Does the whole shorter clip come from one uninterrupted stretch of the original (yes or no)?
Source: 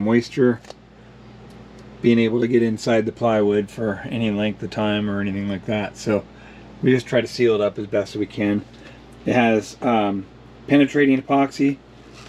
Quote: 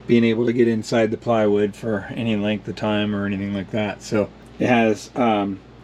no